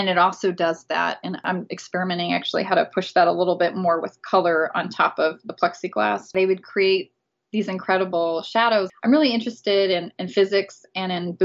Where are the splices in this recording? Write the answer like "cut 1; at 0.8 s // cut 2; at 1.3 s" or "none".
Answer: cut 1; at 1.4 s // cut 2; at 6.3 s